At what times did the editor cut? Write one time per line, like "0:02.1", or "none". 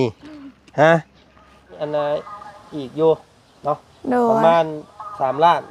0:01.7

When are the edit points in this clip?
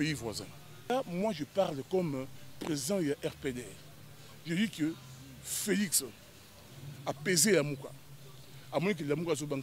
0:00.9

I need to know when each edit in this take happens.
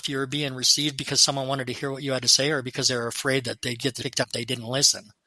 0:04.1

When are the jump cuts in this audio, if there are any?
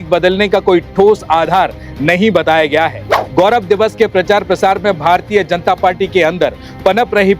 0:03.1

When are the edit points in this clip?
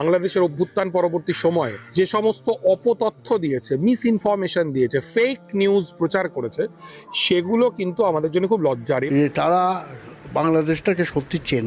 0:09.1

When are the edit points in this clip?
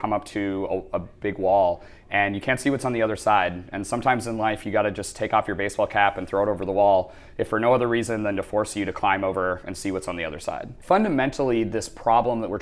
0:10.7

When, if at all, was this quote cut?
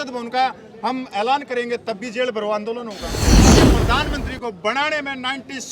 0:03.2
0:03.9

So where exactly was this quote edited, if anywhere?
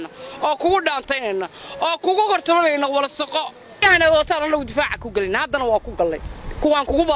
0:03.8

